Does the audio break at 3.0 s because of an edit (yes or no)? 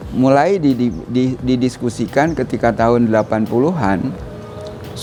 no